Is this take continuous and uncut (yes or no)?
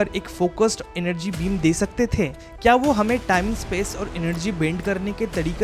no